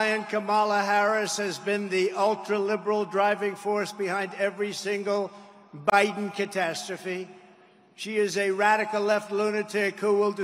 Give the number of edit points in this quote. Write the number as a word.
zero